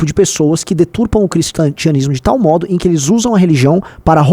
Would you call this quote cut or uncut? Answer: uncut